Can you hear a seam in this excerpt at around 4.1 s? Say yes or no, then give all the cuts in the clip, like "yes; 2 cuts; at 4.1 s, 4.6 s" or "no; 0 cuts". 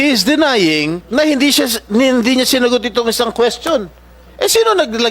no; 1 cut; at 1.0 s